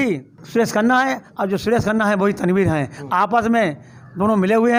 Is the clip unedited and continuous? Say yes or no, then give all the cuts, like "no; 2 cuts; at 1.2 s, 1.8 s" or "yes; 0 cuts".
yes; 0 cuts